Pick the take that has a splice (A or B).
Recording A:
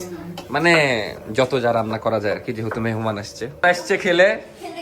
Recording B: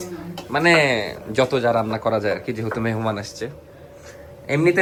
A